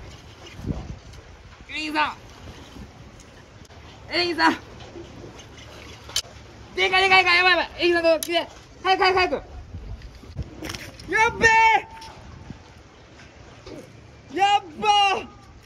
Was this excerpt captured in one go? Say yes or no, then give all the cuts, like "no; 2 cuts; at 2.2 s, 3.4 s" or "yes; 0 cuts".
no; 3 cuts; at 3.7 s, 6.2 s, 10.4 s